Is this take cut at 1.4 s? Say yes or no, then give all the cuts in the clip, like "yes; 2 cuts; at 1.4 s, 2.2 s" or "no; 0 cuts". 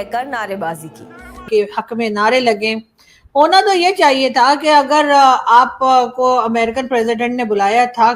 yes; 1 cut; at 1.4 s